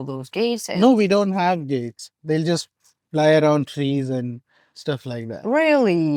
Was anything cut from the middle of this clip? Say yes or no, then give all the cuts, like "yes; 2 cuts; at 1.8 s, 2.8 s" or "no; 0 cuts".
no; 0 cuts